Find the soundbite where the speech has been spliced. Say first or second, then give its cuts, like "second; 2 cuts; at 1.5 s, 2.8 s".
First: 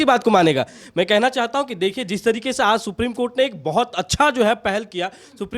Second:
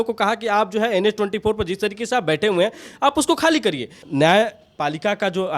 second; 1 cut; at 4.0 s